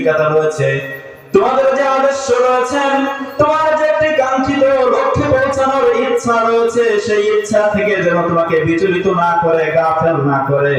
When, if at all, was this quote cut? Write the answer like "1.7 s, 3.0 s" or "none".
none